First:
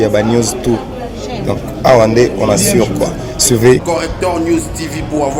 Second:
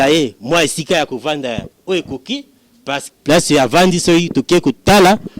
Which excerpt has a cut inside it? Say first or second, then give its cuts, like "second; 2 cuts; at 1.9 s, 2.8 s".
second; 1 cut; at 3.0 s